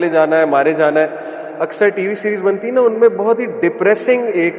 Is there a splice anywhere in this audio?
yes; 1 cut; at 1.4 s

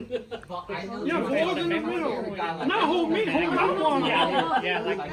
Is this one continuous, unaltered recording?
yes; 0 cuts

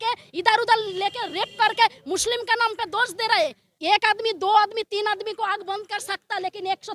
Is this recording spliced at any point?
yes; 1 cut; at 3.7 s

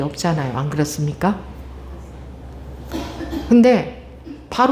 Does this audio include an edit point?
no; 0 cuts

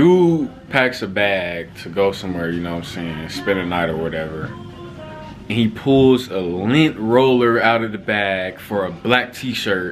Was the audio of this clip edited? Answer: no; 0 cuts

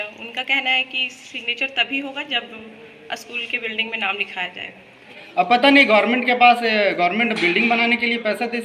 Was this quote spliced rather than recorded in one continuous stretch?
yes; 1 cut; at 5.1 s

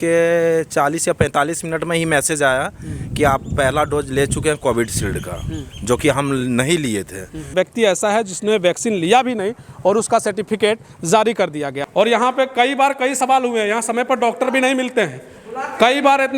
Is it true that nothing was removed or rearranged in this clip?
no; 2 cuts; at 7.5 s, 11.7 s

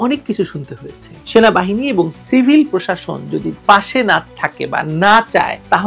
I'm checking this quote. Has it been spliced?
yes; 1 cut; at 1.1 s

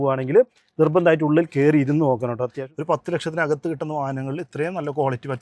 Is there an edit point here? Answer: yes; 1 cut; at 2.6 s

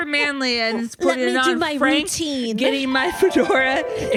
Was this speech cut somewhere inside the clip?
no; 0 cuts

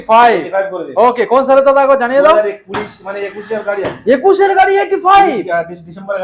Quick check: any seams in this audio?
no; 0 cuts

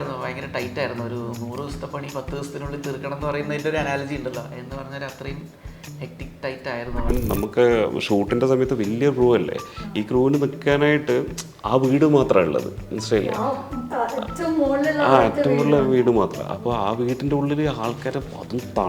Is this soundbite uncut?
no; 1 cut; at 7.1 s

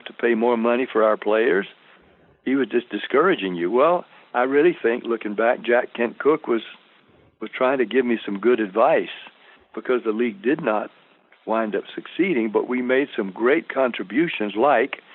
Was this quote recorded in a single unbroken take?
yes; 0 cuts

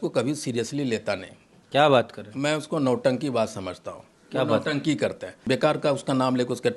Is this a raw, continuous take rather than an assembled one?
no; 1 cut; at 5.4 s

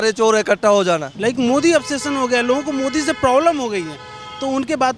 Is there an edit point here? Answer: yes; 1 cut; at 1.1 s

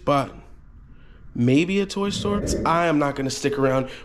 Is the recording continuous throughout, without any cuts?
no; 1 cut; at 2.5 s

